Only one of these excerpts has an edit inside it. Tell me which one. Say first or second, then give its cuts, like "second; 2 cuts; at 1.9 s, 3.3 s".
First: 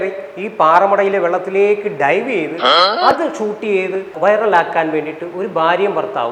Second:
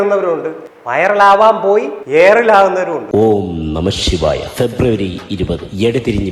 second; 1 cut; at 3.0 s